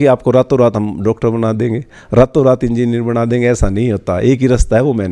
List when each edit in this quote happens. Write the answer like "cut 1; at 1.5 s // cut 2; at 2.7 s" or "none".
none